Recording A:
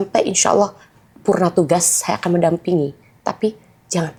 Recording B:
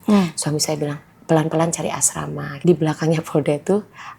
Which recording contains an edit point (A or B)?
B